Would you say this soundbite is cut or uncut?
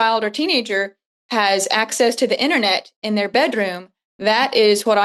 uncut